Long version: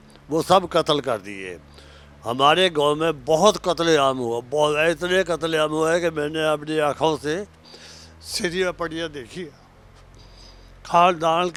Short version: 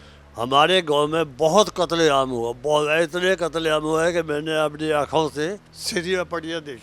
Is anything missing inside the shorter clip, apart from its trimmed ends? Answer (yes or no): yes